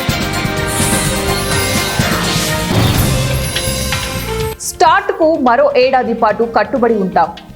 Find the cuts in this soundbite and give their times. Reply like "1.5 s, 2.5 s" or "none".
4.5 s